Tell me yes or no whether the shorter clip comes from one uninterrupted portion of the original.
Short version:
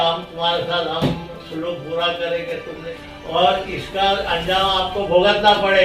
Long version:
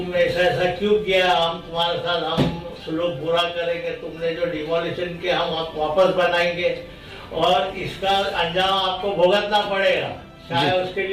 no